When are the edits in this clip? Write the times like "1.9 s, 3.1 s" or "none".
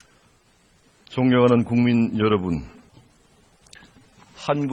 2.8 s